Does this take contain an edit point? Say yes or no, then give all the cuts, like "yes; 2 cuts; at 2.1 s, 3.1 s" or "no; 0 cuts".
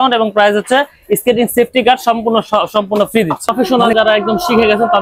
yes; 1 cut; at 3.6 s